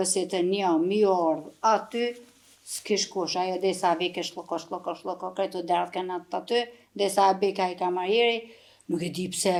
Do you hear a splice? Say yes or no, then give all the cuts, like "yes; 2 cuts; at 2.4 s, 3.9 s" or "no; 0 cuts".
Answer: no; 0 cuts